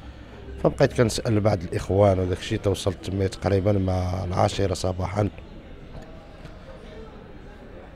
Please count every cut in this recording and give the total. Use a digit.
0